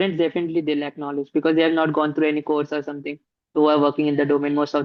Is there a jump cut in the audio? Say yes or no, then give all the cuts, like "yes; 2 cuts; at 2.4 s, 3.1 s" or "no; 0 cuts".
no; 0 cuts